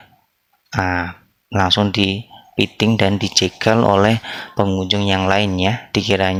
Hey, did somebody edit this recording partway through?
no; 0 cuts

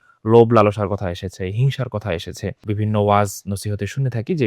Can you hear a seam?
yes; 1 cut; at 2.6 s

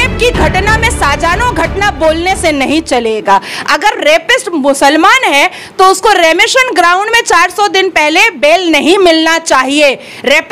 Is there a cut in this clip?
no; 0 cuts

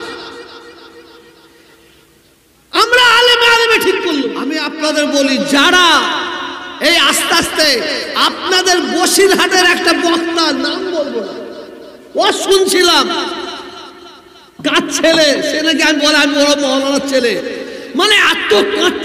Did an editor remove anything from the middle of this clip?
yes; 1 cut; at 4.7 s

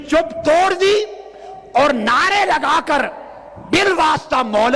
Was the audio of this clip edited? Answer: no; 0 cuts

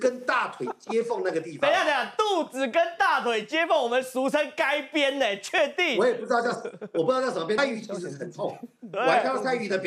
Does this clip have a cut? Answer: yes; 1 cut; at 7.6 s

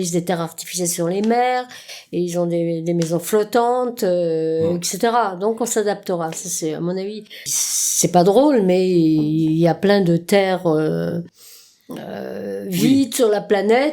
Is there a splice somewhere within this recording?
yes; 1 cut; at 7.5 s

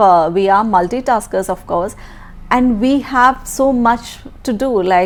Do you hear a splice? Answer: no; 0 cuts

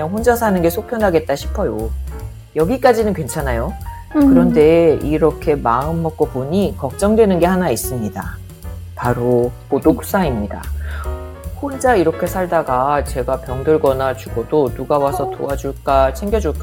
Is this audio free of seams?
yes; 0 cuts

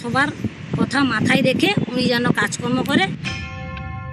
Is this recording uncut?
no; 1 cut; at 3.2 s

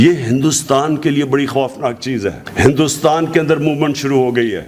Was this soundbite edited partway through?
yes; 1 cut; at 2.4 s

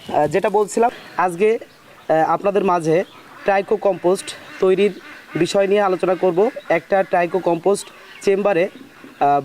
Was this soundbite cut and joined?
yes; 1 cut; at 1.0 s

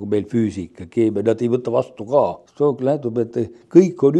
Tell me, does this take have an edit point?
yes; 1 cut; at 2.4 s

